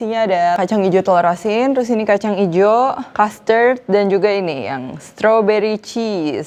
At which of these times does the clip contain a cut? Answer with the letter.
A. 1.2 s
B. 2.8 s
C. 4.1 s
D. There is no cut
D